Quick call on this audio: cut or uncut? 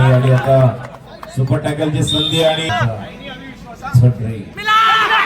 cut